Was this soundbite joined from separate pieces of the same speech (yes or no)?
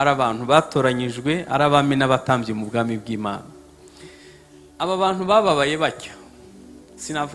no